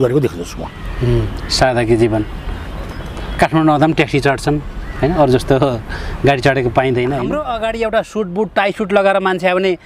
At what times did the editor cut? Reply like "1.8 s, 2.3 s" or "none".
7.5 s